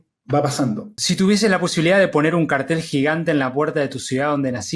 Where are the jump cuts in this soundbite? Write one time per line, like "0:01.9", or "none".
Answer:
0:00.9

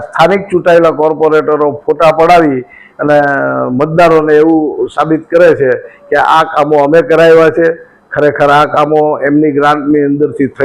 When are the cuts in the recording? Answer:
none

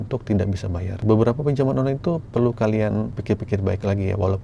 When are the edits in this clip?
0:01.0
0:03.2

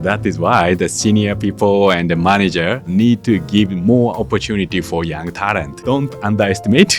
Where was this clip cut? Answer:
0:02.9
0:05.8

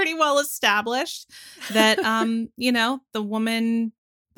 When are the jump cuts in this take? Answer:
none

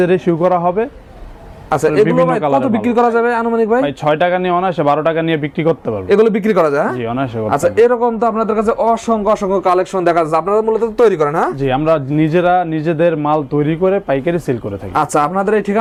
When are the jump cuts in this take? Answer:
none

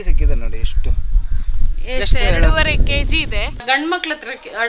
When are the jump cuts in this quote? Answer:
0:03.6

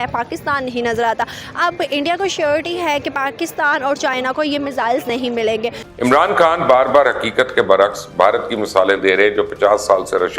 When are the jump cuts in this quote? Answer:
0:05.8

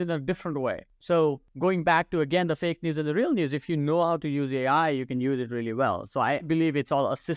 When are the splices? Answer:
0:00.9
0:01.5
0:06.5

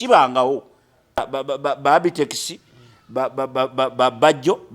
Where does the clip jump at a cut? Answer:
0:01.2

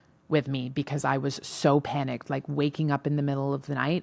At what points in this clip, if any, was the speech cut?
none

